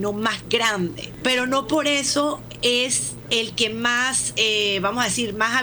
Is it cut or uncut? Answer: cut